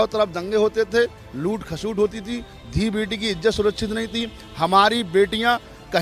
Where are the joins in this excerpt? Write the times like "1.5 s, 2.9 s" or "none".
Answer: none